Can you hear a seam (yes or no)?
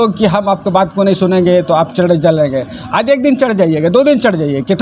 no